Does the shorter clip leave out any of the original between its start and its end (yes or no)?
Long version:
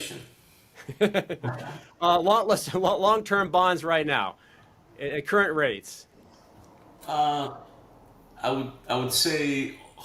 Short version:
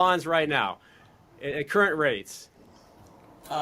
no